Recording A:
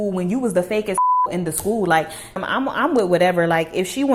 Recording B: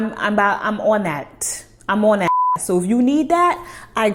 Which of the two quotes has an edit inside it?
A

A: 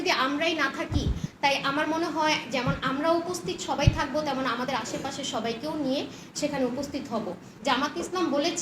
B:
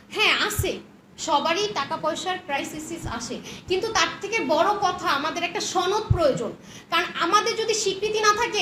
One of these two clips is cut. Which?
A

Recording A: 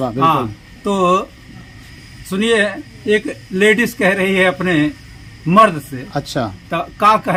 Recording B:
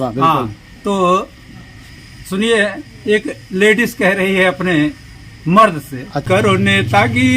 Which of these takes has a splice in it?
B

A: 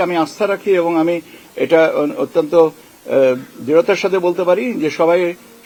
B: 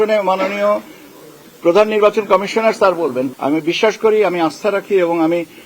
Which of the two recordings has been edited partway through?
B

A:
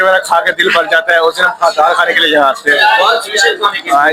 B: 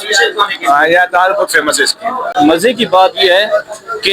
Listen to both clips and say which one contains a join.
B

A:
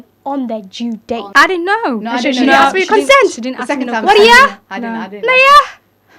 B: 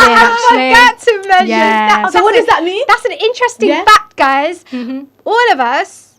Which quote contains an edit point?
A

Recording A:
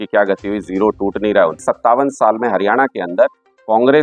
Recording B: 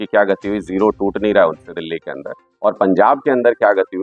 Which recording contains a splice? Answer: A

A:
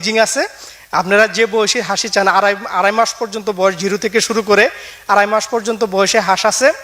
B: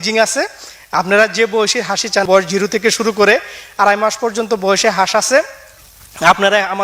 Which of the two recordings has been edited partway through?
B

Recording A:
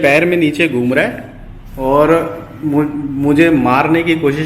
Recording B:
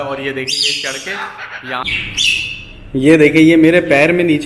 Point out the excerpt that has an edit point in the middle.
B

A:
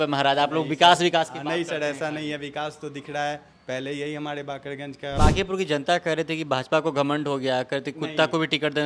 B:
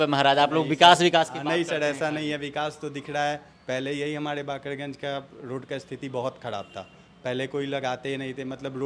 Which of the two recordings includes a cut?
A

